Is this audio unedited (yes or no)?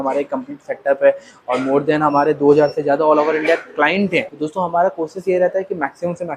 no